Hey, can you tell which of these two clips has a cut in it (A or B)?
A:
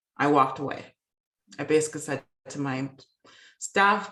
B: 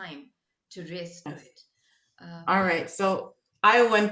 B